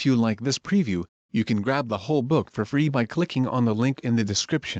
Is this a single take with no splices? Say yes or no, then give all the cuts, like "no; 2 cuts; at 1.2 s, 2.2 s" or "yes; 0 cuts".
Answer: no; 1 cut; at 1.0 s